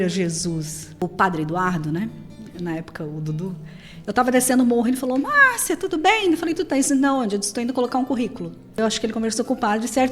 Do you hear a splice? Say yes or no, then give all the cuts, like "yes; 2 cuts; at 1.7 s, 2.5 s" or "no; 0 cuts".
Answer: yes; 2 cuts; at 1.1 s, 8.8 s